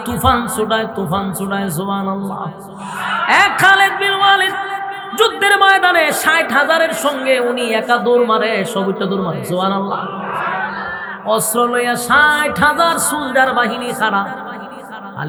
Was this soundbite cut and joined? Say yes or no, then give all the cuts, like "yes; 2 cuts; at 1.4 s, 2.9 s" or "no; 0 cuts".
no; 0 cuts